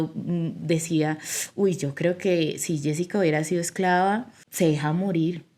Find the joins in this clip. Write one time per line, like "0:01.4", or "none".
0:04.4